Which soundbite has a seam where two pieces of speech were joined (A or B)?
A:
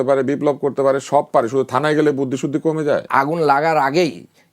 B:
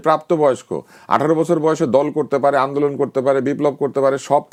A